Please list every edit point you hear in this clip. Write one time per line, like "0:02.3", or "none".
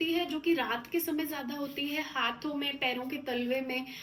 none